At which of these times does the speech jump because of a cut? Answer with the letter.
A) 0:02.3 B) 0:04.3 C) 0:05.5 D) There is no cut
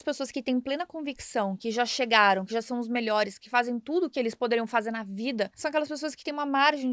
C